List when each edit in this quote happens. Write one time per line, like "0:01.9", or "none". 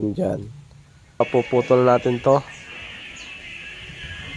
0:01.2

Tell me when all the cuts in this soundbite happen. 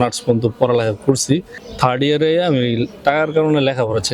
0:01.6

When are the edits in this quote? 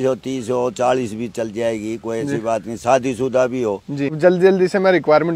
0:04.2

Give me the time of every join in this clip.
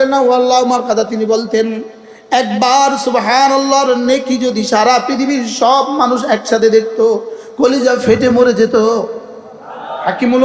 none

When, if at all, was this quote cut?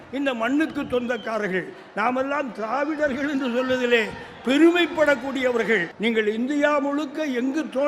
0:05.9

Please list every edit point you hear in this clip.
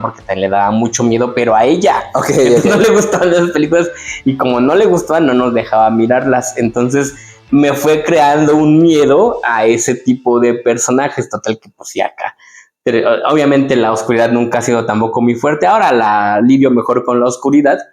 none

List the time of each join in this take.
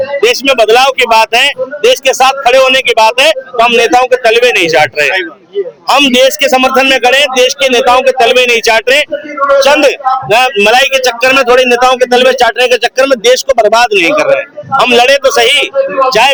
none

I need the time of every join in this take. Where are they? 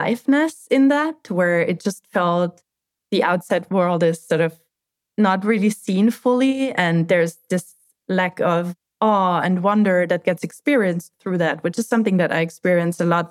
none

